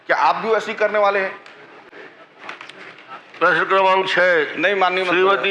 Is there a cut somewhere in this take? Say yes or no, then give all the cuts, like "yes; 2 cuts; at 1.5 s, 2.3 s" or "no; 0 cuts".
no; 0 cuts